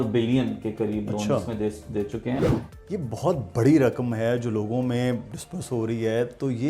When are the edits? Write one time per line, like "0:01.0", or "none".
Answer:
0:02.4

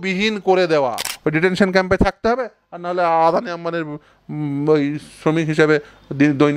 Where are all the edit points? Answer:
0:01.1

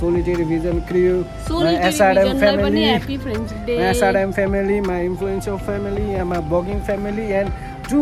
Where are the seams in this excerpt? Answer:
none

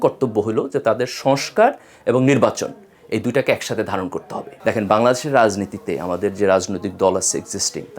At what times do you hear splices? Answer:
0:04.4

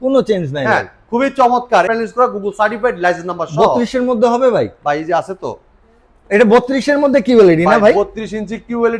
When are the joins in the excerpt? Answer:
0:01.9

